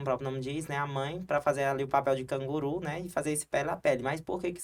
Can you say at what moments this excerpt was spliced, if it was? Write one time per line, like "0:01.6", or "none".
none